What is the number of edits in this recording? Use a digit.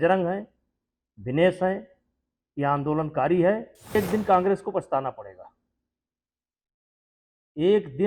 1